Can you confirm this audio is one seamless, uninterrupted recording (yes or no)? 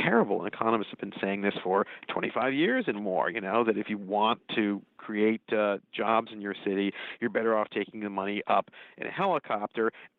yes